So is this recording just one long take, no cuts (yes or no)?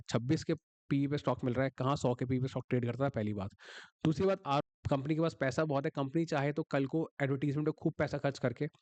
no